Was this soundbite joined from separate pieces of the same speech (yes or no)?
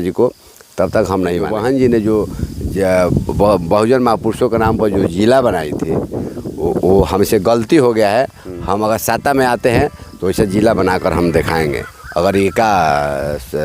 yes